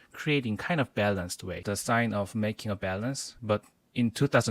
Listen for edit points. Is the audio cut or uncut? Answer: cut